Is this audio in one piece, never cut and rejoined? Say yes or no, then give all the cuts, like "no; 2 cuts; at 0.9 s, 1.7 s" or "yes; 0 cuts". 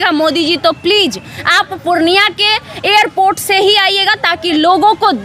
yes; 0 cuts